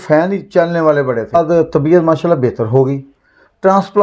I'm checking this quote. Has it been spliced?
yes; 1 cut; at 1.4 s

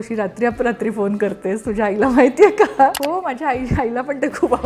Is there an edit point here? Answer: yes; 1 cut; at 3.0 s

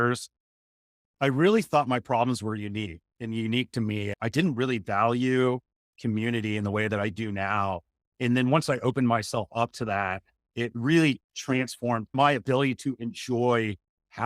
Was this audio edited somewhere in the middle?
yes; 1 cut; at 12.1 s

